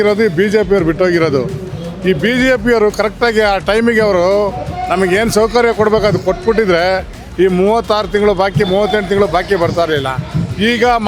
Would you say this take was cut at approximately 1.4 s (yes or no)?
no